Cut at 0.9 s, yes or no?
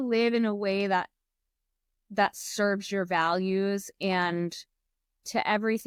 no